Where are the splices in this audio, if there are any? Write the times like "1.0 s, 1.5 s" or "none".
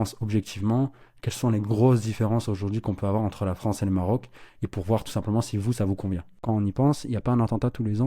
6.4 s